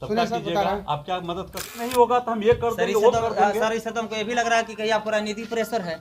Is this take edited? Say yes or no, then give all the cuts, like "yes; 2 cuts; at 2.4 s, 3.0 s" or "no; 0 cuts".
yes; 1 cut; at 1.9 s